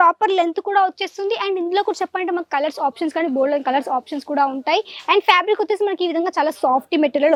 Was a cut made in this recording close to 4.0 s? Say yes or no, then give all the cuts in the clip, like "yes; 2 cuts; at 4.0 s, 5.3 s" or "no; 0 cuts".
no; 0 cuts